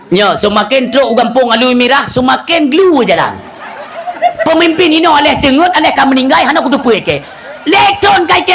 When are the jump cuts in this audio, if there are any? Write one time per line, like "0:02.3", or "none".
0:04.2